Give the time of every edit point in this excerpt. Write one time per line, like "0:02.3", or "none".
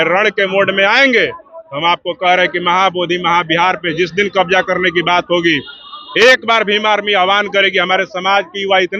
none

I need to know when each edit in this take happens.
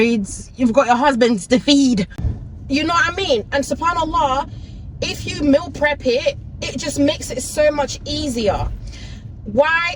none

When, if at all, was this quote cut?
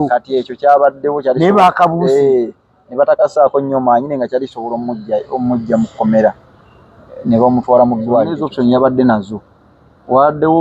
0:08.4

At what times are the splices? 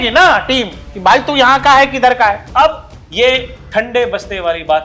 0:02.4

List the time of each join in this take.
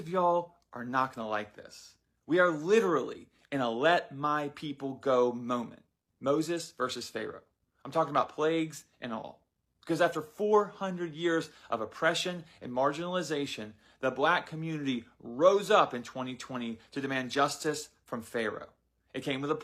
none

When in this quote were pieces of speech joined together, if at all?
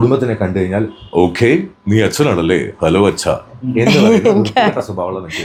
none

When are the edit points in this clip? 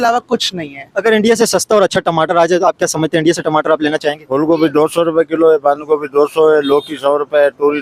0:04.2

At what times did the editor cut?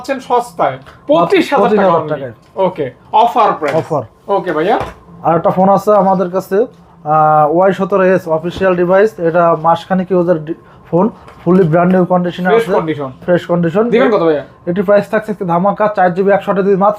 none

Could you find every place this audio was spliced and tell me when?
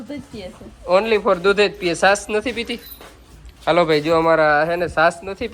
none

